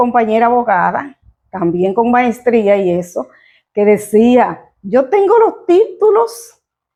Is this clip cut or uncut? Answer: uncut